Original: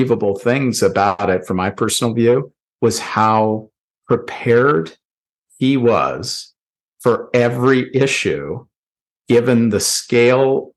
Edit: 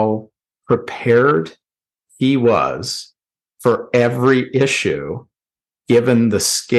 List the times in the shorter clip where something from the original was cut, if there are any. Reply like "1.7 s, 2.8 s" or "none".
none

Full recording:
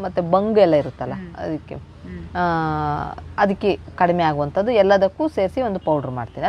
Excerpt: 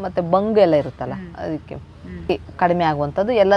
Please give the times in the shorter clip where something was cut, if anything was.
2.3 s

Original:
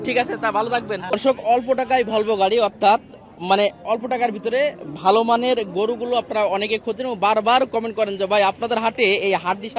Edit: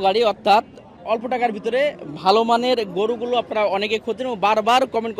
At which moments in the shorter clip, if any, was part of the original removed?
1.0 s

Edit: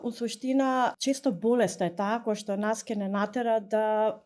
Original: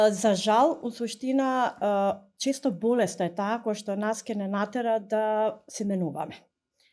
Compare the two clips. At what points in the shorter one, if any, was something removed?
1.0 s

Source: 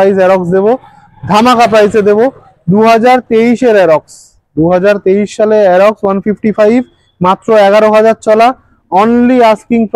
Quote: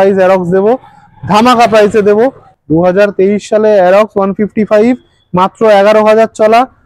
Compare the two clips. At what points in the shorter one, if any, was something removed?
2.5 s

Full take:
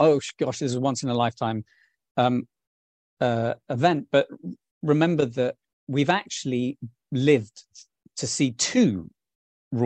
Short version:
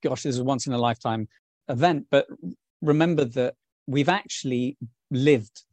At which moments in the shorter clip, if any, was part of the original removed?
1.6 s

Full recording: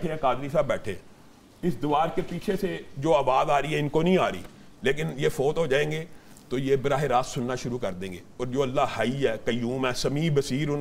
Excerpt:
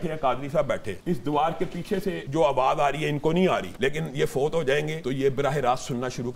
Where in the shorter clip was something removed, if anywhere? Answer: 0.9 s, 2.2 s, 3.7 s, 5.0 s

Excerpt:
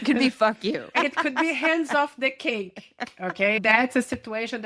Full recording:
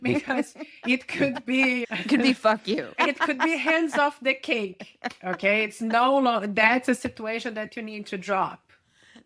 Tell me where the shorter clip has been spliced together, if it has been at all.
3.6 s

